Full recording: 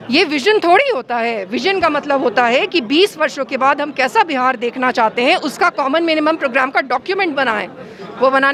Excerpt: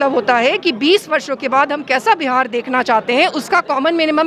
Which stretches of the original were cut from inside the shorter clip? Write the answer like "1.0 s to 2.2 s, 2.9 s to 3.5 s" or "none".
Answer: none